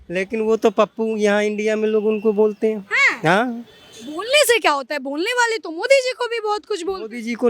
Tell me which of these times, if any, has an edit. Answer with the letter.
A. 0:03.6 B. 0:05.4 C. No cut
C